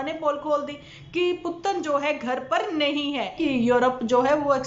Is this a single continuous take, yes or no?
no